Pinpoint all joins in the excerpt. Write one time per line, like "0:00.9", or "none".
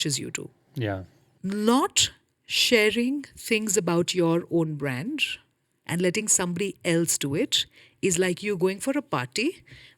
0:01.2